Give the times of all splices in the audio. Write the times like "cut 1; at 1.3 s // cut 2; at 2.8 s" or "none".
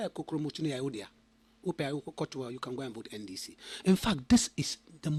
none